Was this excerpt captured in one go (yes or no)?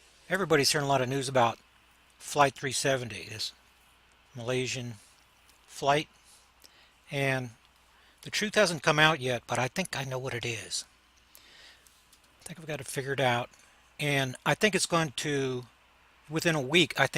no